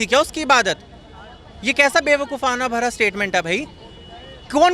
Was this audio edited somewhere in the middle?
no; 0 cuts

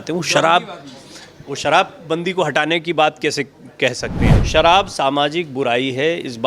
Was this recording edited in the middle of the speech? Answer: yes; 1 cut; at 4.3 s

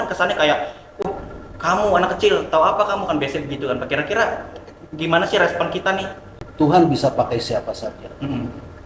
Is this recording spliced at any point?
yes; 1 cut; at 6.4 s

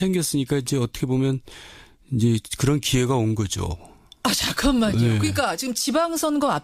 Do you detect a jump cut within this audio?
yes; 1 cut; at 3.7 s

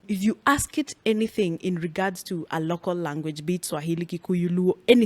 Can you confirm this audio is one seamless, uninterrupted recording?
yes; 0 cuts

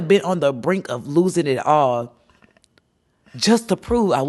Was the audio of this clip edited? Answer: no; 0 cuts

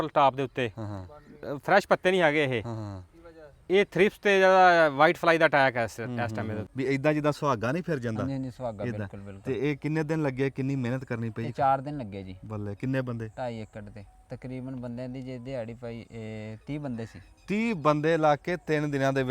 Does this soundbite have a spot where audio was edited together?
yes; 1 cut; at 6.6 s

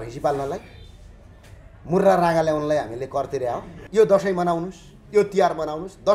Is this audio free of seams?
no; 1 cut; at 3.7 s

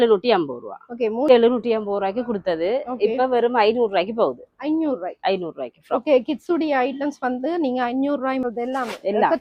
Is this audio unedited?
no; 2 cuts; at 1.3 s, 8.4 s

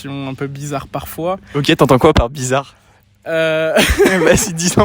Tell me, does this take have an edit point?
no; 0 cuts

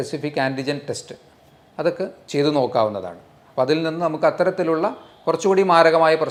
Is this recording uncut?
yes; 0 cuts

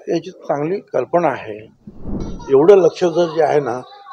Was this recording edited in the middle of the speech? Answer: yes; 1 cut; at 2.3 s

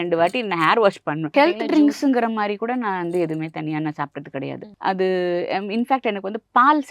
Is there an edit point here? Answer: yes; 2 cuts; at 1.2 s, 4.7 s

